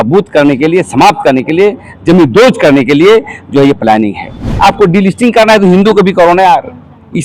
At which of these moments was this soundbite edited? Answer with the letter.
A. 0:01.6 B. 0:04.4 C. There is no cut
B